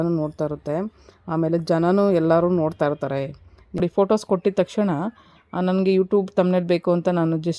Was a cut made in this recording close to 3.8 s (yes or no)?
yes